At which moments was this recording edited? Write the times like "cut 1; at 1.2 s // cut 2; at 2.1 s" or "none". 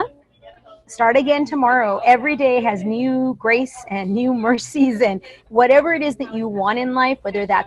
cut 1; at 5.3 s